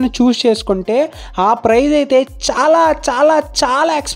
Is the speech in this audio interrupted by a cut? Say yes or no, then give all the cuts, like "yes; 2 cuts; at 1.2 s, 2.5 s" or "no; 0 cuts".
no; 0 cuts